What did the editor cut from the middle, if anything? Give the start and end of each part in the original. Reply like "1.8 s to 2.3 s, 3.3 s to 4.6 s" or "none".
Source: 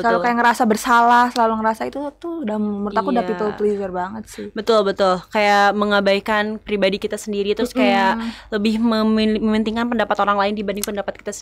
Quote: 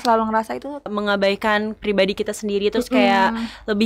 2.2 s to 5.8 s